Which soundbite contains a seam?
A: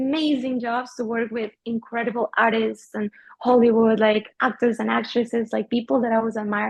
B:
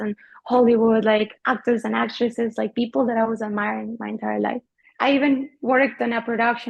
B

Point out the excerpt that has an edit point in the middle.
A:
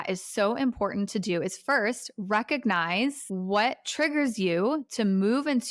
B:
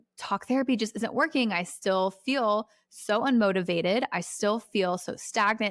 A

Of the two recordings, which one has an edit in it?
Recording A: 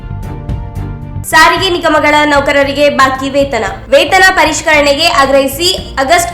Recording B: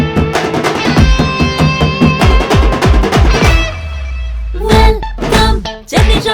A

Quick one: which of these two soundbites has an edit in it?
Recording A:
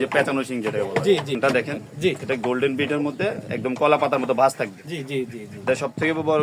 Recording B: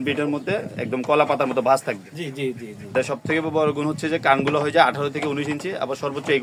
A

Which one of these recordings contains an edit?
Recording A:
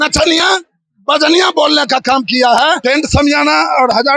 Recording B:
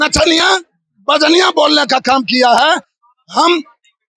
A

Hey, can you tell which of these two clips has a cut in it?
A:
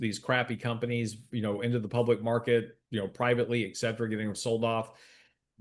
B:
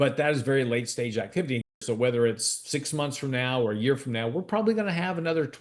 B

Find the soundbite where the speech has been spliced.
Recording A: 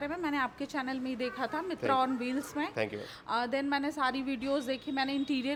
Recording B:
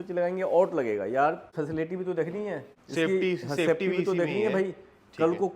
B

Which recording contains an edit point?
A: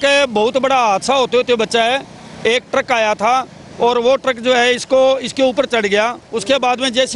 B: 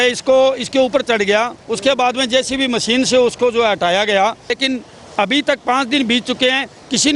B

